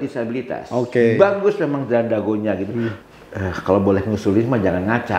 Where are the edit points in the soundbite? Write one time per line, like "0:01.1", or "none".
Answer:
0:02.9

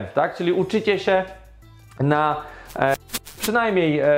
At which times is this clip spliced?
0:03.1

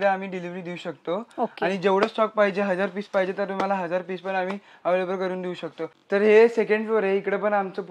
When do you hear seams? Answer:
0:05.9

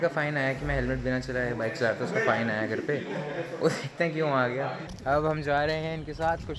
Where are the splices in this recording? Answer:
0:04.9

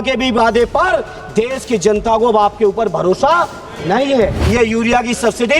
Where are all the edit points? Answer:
0:04.4

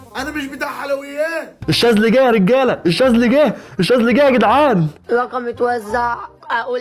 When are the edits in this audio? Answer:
0:04.9

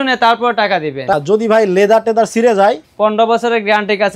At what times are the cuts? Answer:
0:01.1

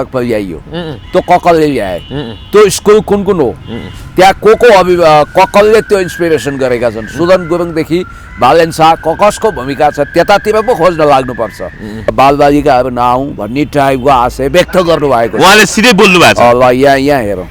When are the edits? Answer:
0:12.1

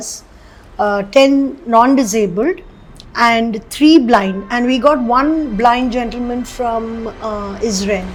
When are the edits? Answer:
none

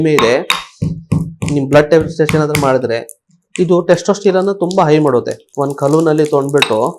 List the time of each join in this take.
0:05.4

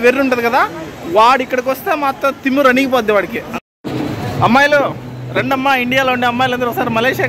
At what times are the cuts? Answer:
0:03.4

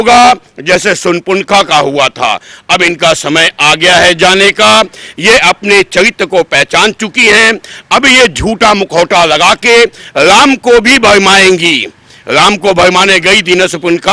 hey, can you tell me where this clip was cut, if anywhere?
none

